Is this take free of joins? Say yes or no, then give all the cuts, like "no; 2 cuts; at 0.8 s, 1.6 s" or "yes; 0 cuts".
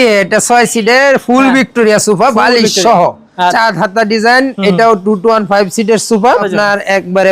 no; 2 cuts; at 3.5 s, 6.4 s